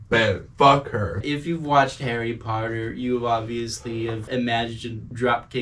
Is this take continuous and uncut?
no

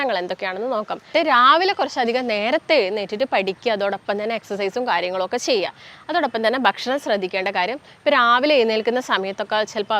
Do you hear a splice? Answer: yes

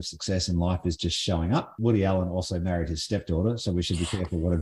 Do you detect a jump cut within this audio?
yes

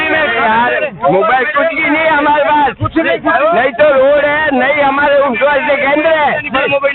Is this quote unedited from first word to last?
yes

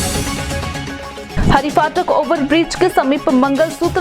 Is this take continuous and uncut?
no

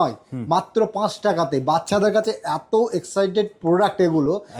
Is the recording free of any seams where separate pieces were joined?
yes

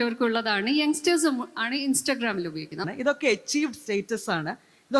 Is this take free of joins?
no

